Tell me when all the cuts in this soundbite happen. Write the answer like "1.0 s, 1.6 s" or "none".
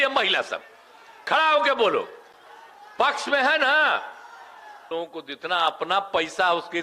4.8 s

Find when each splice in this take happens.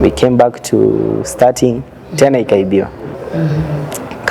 3.1 s

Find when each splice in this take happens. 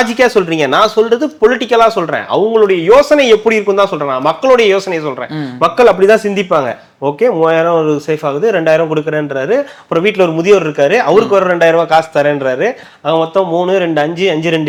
none

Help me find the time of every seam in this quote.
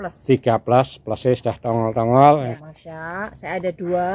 2.5 s

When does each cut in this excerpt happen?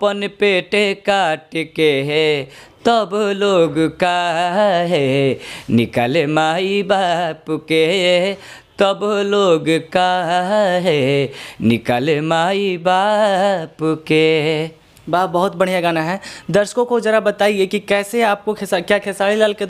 none

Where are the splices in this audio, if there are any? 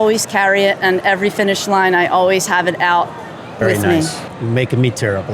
4.2 s

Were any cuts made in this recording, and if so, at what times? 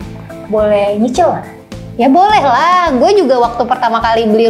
none

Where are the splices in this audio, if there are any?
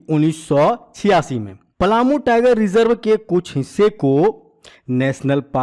none

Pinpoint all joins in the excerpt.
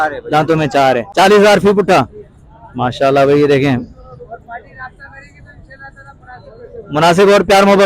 1.1 s

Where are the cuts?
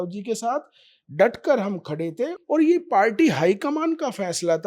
2.4 s

